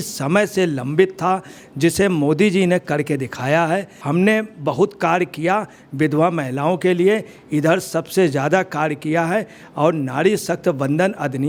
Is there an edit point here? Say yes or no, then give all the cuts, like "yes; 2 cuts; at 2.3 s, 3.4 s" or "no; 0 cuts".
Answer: no; 0 cuts